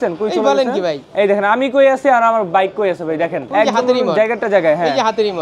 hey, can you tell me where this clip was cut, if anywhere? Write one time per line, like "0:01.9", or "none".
0:01.0
0:03.4